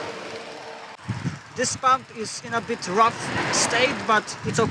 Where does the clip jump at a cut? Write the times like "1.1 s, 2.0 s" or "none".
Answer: 1.1 s

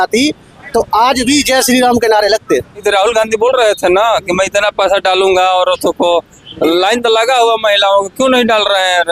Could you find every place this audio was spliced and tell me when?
2.8 s

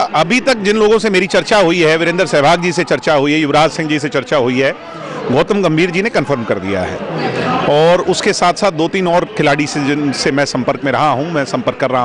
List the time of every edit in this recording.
none

